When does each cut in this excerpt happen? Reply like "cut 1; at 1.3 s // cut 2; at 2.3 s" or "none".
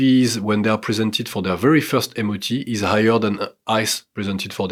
none